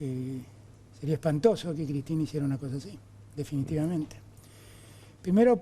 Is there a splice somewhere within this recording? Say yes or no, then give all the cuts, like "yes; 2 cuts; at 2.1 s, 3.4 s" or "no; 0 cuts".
no; 0 cuts